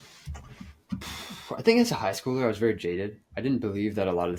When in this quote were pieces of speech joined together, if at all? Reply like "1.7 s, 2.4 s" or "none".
none